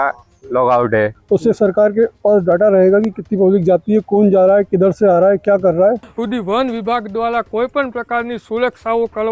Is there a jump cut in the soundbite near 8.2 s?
no; 2 cuts; at 1.2 s, 6.1 s

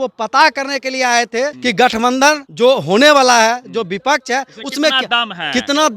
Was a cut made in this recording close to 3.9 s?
no; 2 cuts; at 1.6 s, 2.5 s

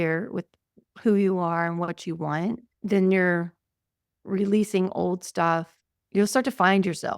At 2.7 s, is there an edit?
yes; 2 cuts; at 2.7 s, 5.8 s

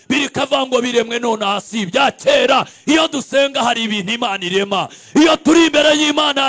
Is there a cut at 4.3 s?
no; 0 cuts

